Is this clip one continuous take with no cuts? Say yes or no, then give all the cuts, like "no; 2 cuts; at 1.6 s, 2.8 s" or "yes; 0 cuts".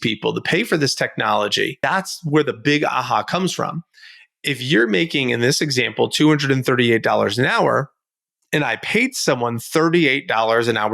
no; 1 cut; at 1.8 s